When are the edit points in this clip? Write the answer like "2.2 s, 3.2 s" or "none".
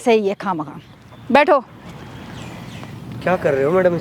none